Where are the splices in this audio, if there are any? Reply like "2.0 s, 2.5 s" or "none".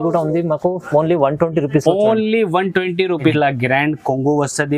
3.2 s